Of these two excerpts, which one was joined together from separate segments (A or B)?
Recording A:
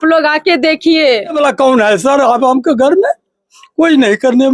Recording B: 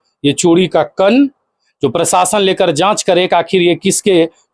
A